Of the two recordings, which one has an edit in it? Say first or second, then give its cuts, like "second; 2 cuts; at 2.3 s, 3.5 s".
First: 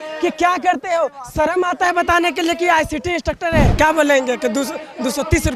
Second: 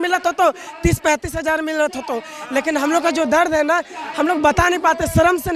first; 1 cut; at 3.7 s